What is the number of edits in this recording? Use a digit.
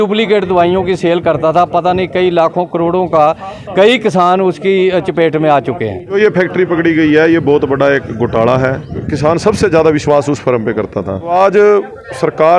3